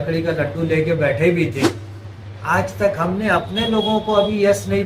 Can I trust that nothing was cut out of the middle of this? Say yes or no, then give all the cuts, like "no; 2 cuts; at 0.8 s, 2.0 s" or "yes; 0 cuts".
no; 1 cut; at 2.0 s